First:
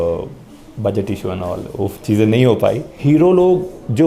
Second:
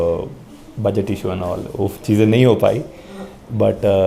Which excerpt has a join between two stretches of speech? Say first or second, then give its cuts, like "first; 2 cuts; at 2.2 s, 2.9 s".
first; 1 cut; at 2.9 s